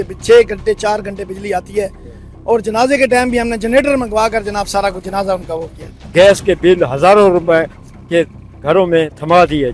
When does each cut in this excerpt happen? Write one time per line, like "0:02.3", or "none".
0:06.0